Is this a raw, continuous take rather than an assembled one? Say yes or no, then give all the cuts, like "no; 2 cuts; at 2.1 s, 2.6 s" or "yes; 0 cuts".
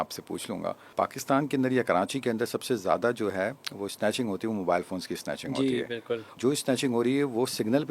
no; 2 cuts; at 0.8 s, 6.3 s